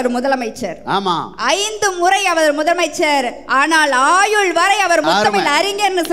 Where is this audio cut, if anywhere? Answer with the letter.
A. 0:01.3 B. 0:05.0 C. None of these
B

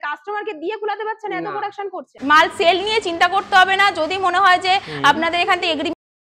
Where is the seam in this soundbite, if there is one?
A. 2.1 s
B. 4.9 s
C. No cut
A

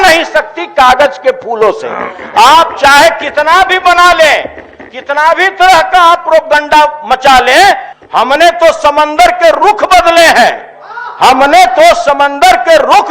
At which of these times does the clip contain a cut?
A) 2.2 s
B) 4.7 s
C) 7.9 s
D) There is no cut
C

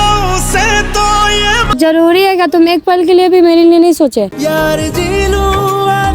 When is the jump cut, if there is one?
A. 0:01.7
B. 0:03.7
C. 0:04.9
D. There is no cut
A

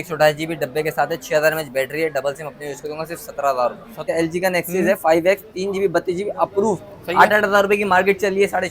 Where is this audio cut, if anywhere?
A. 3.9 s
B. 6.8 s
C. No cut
A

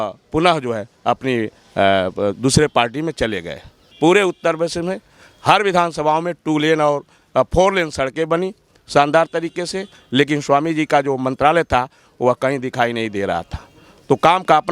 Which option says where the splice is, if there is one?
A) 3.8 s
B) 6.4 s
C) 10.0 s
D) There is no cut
A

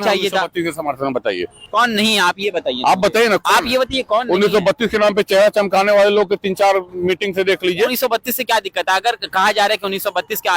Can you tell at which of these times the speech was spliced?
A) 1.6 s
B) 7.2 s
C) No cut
A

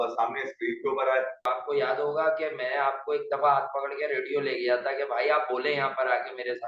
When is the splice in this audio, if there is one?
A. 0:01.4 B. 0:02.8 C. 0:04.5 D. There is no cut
A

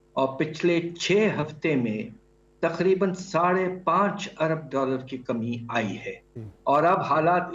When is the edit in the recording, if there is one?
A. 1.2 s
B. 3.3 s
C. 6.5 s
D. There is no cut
C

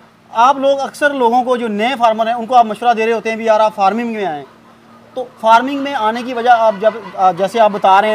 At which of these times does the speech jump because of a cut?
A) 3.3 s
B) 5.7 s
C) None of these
C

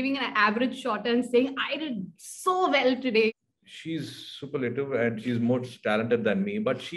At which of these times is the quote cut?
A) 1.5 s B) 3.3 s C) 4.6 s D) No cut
B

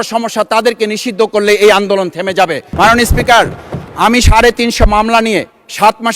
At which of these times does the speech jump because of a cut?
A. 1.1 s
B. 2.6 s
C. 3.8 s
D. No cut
B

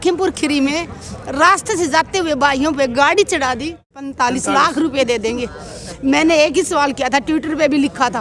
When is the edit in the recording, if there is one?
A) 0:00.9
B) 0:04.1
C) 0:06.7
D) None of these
B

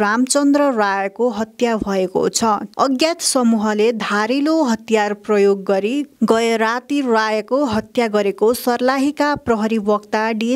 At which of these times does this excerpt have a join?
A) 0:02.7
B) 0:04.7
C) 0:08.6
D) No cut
A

